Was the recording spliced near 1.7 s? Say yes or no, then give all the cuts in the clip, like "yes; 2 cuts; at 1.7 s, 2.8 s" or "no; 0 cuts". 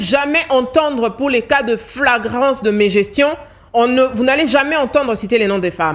no; 0 cuts